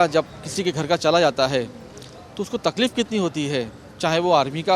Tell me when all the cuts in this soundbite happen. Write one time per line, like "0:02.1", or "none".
none